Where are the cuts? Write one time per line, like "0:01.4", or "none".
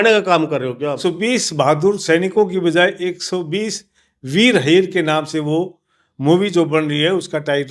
0:01.0